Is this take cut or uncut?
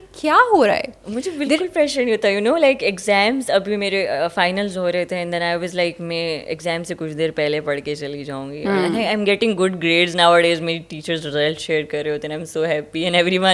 uncut